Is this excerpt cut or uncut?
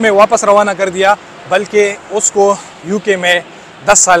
uncut